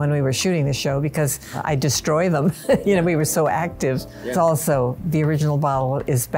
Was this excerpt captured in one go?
no; 2 cuts; at 1.5 s, 4.3 s

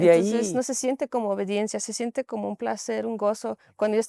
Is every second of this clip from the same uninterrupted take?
yes; 0 cuts

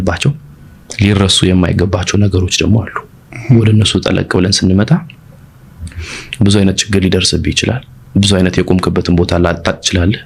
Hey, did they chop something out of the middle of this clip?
no; 0 cuts

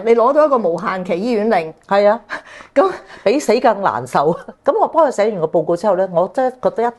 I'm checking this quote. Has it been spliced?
yes; 1 cut; at 4.5 s

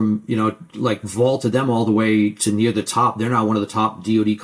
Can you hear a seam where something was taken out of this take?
no; 0 cuts

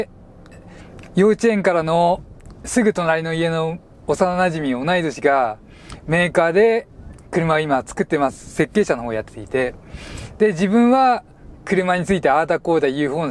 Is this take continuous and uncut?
yes; 0 cuts

